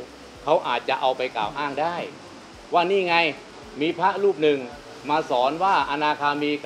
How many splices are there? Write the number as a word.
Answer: zero